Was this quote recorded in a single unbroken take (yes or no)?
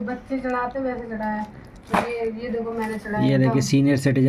yes